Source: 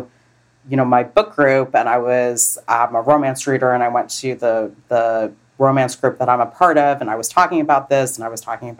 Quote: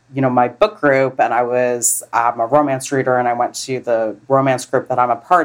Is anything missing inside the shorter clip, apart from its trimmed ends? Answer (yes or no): yes